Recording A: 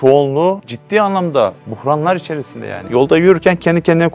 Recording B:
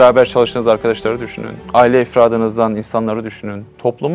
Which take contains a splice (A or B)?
A